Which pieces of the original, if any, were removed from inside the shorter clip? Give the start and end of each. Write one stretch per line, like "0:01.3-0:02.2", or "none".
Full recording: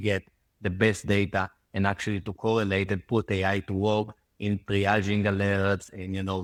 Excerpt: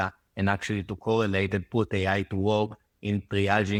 none